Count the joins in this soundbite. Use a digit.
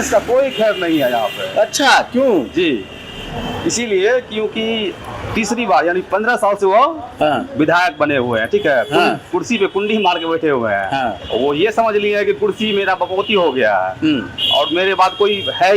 0